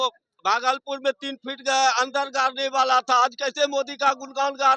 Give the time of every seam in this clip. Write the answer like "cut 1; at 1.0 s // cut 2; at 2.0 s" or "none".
none